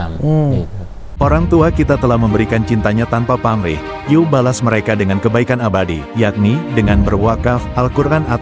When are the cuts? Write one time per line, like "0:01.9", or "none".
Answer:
0:01.2